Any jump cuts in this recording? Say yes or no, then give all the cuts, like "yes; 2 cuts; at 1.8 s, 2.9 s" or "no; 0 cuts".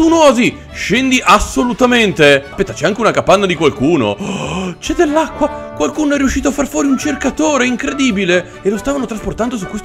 yes; 2 cuts; at 2.6 s, 5.6 s